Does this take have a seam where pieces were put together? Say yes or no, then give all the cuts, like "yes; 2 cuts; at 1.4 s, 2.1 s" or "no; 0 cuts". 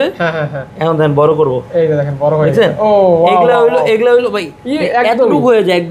no; 0 cuts